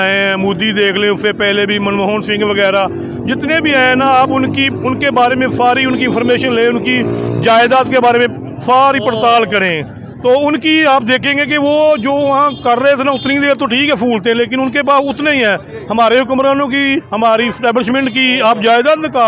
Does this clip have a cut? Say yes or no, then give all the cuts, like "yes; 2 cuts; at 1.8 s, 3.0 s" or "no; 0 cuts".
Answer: no; 0 cuts